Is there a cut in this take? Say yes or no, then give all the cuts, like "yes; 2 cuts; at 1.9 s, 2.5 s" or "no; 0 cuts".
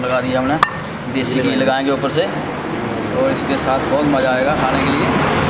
no; 0 cuts